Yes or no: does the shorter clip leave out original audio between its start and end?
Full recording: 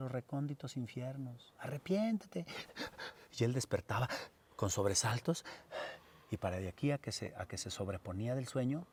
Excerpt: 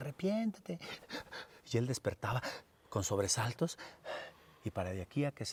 no